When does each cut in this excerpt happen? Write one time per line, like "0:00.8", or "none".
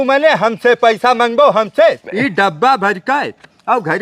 0:02.1